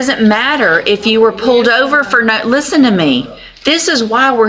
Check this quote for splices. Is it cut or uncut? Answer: uncut